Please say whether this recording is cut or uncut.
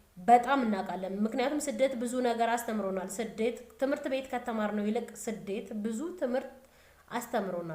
uncut